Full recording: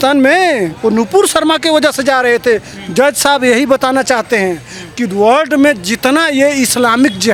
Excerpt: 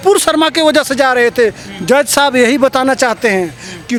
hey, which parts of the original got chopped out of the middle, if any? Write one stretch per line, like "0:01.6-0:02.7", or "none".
none